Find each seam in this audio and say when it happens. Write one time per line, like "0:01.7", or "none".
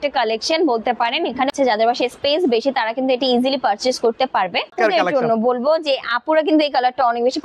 0:01.5
0:04.7